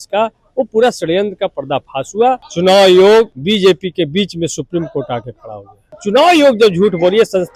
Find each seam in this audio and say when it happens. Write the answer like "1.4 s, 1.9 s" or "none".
2.5 s, 3.4 s, 5.9 s